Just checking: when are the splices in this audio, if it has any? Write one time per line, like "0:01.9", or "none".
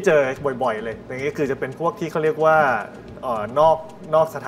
none

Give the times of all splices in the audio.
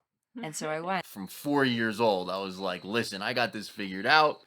0:01.1

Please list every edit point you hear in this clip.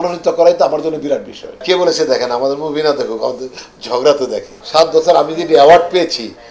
0:01.6
0:04.5

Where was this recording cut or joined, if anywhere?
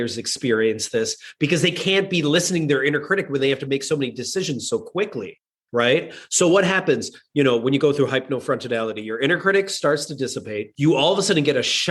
0:10.6

